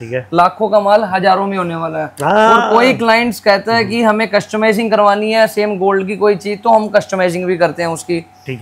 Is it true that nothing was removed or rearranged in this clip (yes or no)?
yes